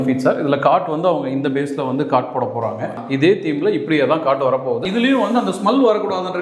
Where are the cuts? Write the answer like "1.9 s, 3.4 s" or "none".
3.0 s, 4.8 s